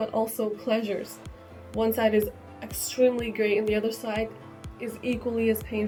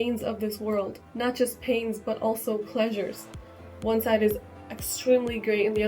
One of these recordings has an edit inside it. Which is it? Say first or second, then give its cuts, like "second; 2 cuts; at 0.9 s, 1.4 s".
second; 1 cut; at 1.0 s